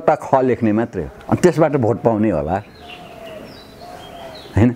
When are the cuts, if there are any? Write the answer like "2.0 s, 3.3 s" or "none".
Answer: none